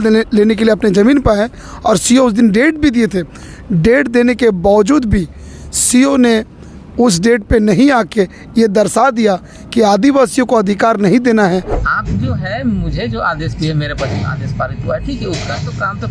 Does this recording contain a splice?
yes; 1 cut; at 11.8 s

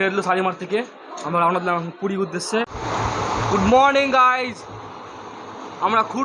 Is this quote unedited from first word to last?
no; 1 cut; at 2.8 s

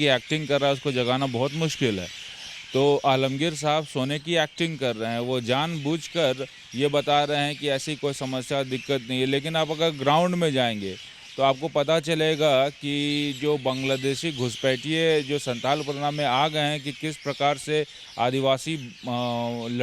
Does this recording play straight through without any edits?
yes; 0 cuts

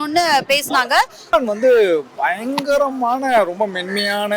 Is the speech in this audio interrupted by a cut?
yes; 1 cut; at 1.3 s

